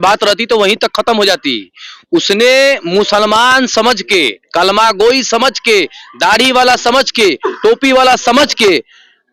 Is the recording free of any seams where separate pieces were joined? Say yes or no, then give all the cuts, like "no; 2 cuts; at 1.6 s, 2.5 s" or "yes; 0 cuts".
yes; 0 cuts